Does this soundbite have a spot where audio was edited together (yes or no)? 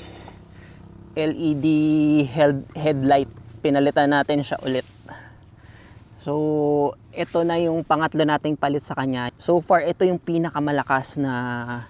no